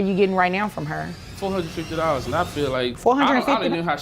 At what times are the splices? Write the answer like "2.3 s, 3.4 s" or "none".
1.2 s, 3.0 s